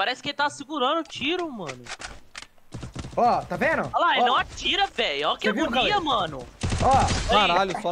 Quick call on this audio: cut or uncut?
uncut